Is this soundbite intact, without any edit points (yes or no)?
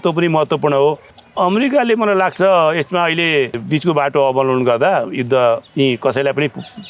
no